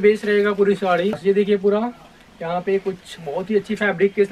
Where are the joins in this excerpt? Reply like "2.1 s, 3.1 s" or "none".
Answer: 1.2 s